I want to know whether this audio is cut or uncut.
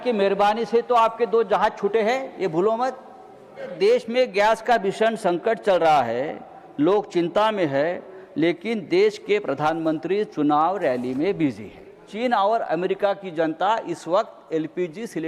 cut